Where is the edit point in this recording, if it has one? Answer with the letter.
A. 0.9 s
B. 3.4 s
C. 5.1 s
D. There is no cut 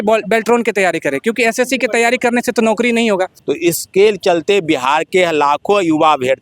B